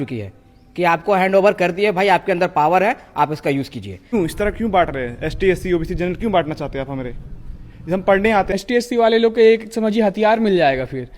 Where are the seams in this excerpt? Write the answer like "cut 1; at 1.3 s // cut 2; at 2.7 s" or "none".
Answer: cut 1; at 4.1 s // cut 2; at 8.5 s